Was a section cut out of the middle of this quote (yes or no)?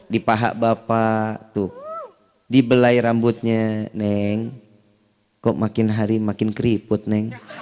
no